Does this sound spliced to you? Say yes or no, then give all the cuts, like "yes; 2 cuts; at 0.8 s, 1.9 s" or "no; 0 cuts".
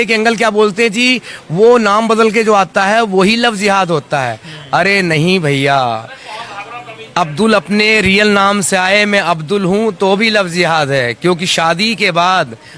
no; 0 cuts